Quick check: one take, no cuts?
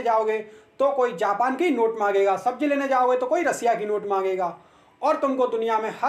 yes; 0 cuts

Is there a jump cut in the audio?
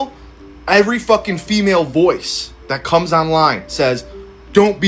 no; 0 cuts

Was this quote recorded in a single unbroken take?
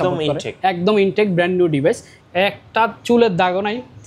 no; 1 cut; at 2.1 s

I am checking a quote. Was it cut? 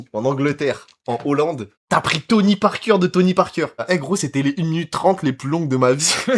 yes; 1 cut; at 3.8 s

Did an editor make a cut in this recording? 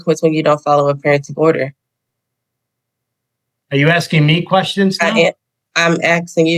no; 0 cuts

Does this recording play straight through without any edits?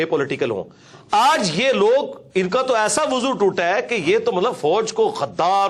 yes; 0 cuts

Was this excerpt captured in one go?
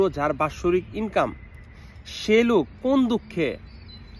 yes; 0 cuts

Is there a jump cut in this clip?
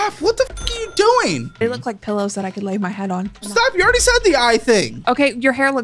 yes; 3 cuts; at 1.6 s, 3.5 s, 4.9 s

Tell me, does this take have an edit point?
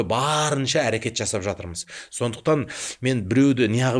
no; 0 cuts

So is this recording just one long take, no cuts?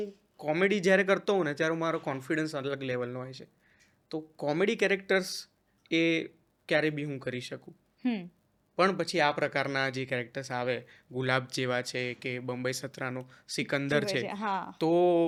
yes; 0 cuts

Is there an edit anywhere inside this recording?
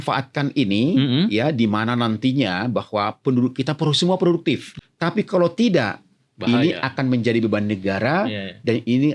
yes; 1 cut; at 4.7 s

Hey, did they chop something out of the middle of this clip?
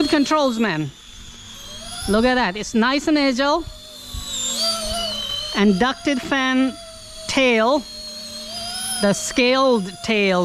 no; 0 cuts

